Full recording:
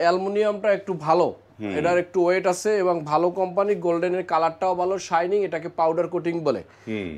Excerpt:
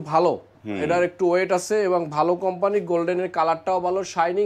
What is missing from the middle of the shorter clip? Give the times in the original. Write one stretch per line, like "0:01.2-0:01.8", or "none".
none